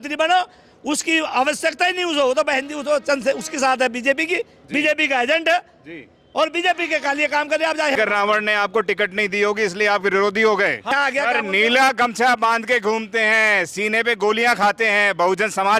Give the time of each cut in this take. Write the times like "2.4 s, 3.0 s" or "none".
8.0 s, 10.9 s